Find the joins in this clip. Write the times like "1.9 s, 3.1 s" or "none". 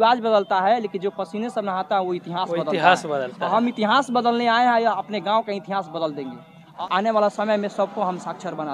6.7 s